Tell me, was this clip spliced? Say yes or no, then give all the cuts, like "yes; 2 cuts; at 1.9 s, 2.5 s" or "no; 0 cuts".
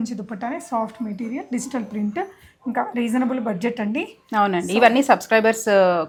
no; 0 cuts